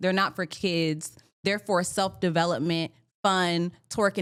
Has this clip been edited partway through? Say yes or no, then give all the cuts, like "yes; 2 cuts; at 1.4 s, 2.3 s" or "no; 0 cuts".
no; 0 cuts